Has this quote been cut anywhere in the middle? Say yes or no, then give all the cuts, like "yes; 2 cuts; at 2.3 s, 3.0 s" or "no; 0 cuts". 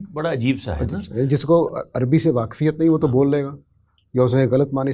no; 0 cuts